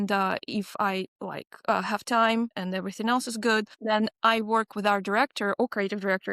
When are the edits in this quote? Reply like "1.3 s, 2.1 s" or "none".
1.2 s, 2.6 s, 3.7 s